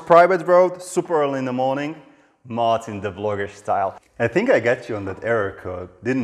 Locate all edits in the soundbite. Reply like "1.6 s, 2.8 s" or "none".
4.0 s